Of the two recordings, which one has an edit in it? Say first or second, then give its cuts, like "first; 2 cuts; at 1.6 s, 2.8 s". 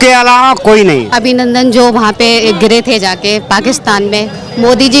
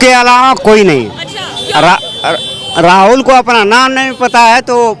first; 1 cut; at 1.1 s